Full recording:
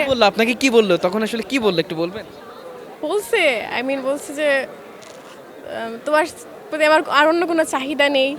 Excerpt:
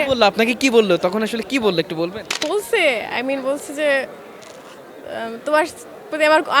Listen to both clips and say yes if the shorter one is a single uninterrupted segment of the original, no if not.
no